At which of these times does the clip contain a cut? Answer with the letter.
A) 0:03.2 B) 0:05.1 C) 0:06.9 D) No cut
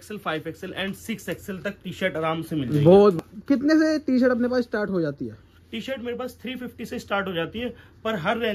A